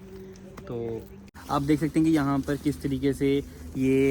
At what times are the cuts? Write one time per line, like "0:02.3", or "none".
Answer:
0:01.3